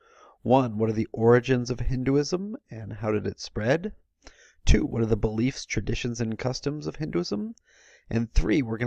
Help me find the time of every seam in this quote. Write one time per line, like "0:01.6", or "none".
none